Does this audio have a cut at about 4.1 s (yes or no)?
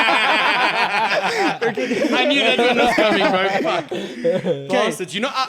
no